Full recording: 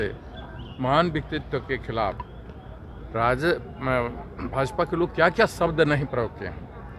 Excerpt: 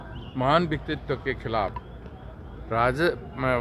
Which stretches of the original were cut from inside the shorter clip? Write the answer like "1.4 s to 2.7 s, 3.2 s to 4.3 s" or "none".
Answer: none